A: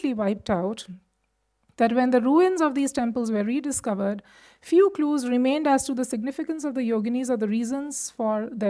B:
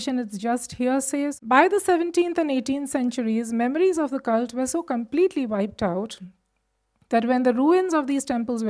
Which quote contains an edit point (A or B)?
B